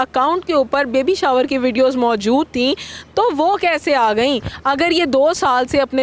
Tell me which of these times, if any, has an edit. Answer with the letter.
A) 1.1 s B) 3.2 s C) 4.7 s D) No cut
D